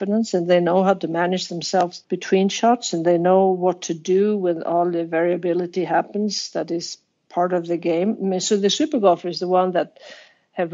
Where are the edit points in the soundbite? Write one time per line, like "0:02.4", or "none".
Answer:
0:02.1